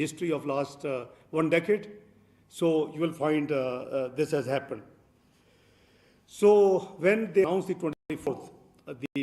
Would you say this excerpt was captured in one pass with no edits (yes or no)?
yes